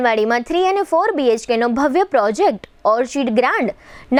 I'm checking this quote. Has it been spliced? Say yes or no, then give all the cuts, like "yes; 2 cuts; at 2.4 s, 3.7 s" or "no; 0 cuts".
no; 0 cuts